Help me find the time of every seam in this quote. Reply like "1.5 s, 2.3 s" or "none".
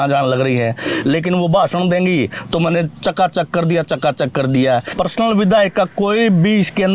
4.9 s

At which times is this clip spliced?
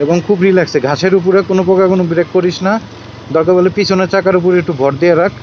none

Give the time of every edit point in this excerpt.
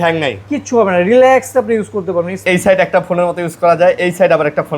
2.5 s

